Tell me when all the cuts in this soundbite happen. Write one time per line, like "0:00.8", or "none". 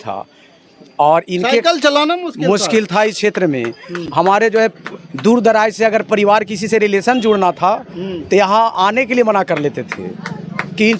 none